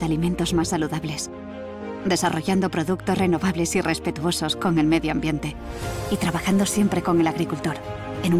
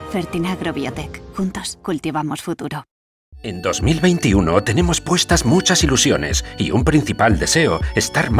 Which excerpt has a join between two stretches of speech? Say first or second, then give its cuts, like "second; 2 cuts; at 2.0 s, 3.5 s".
second; 1 cut; at 3.6 s